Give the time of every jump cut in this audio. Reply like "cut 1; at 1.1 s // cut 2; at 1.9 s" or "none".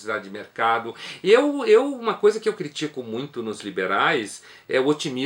cut 1; at 2.4 s